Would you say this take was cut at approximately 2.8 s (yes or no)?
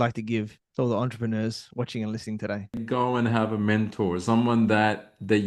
yes